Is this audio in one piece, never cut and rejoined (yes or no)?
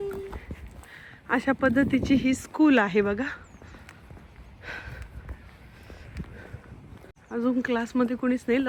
yes